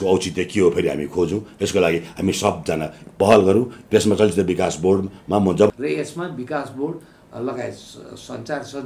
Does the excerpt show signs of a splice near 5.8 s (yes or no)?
yes